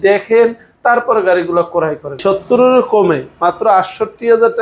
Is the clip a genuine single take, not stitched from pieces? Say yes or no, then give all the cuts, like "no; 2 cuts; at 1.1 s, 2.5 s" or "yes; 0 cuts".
no; 1 cut; at 2.2 s